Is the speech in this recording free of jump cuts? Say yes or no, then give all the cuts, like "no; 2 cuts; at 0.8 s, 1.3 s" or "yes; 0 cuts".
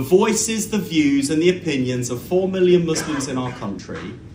yes; 0 cuts